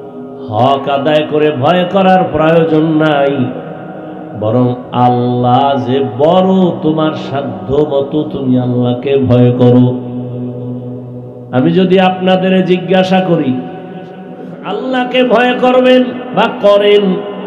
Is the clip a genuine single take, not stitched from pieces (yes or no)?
no